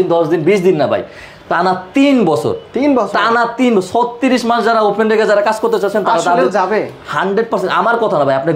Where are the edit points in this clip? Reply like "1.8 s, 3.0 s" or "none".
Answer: none